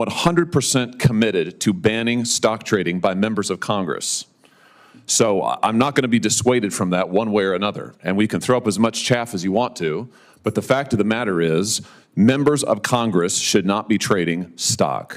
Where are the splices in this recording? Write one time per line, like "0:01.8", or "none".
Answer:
none

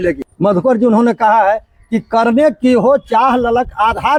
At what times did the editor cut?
none

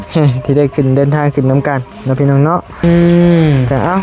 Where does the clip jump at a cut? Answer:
0:02.8

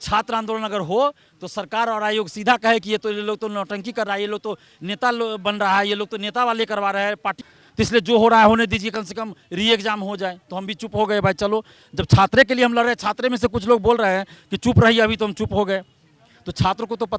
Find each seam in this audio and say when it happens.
0:07.5

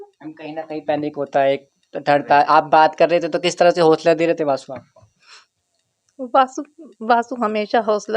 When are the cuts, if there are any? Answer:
none

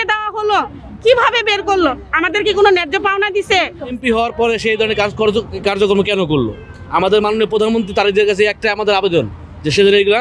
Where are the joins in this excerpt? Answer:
0:03.9

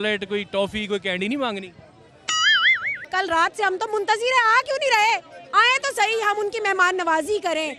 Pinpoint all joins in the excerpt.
0:03.1

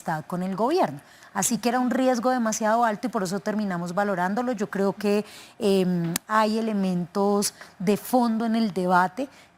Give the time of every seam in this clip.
none

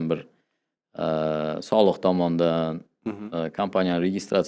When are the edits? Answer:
none

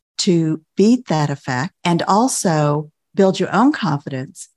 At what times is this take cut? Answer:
0:01.7
0:03.0

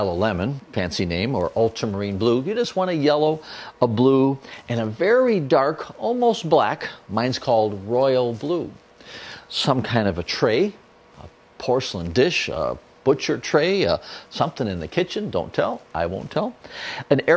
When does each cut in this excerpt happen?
none

